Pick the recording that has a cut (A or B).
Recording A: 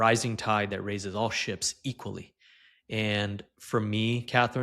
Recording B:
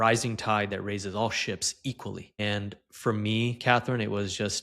B